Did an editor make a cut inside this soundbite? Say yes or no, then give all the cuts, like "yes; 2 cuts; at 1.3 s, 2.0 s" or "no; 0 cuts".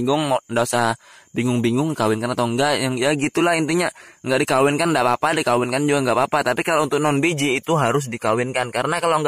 no; 0 cuts